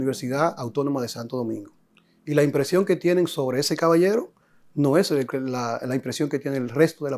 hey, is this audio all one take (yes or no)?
yes